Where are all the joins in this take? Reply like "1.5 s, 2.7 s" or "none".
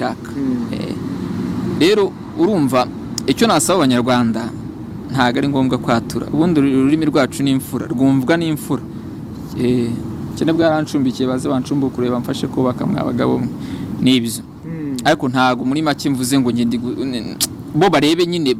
none